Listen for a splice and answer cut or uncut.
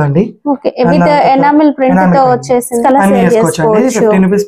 cut